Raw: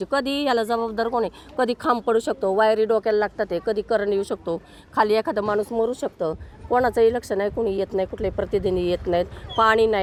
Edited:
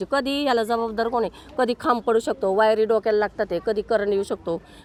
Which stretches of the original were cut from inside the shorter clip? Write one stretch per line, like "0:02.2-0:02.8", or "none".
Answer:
none